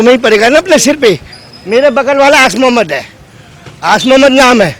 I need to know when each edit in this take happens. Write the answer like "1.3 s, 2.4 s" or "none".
none